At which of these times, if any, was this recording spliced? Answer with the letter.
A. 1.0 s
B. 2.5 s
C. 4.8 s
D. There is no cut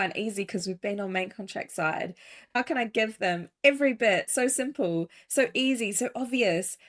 B